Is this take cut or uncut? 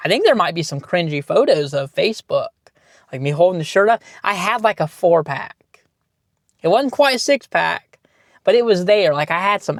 uncut